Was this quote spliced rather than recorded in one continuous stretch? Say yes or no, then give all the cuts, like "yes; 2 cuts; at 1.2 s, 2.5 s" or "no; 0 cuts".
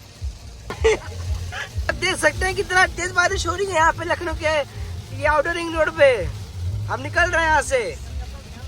yes; 2 cuts; at 0.7 s, 1.7 s